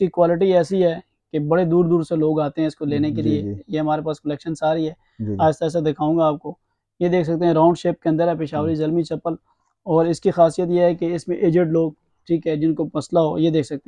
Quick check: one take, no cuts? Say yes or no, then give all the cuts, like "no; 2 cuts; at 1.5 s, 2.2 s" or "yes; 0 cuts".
yes; 0 cuts